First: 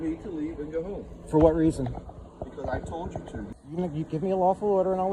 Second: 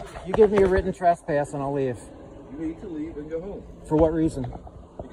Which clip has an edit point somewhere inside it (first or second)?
first